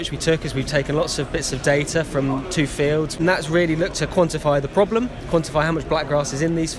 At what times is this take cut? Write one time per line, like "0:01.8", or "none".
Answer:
0:03.2